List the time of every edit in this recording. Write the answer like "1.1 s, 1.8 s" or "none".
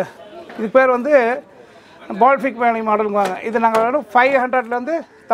none